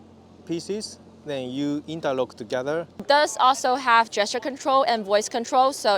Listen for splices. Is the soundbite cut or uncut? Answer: cut